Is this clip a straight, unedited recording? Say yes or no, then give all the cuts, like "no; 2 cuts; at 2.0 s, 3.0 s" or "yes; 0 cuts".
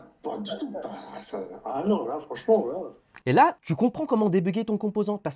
no; 1 cut; at 3.6 s